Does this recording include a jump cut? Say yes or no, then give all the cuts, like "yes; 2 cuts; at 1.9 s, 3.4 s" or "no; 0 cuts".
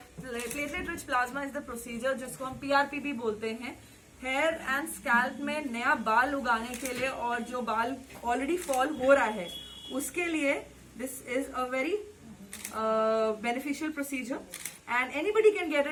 no; 0 cuts